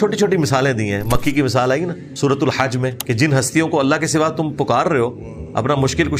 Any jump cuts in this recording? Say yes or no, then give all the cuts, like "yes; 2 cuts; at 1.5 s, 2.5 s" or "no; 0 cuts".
yes; 2 cuts; at 2.0 s, 3.0 s